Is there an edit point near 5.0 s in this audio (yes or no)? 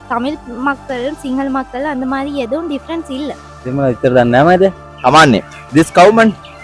no